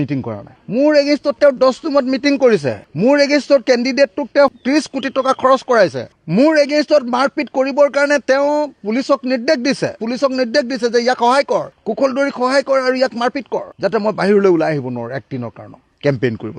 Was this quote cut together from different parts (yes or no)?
yes